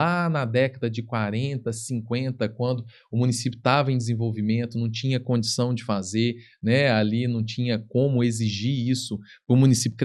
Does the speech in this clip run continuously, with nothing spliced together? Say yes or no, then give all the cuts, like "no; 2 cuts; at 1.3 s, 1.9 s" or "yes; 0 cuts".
yes; 0 cuts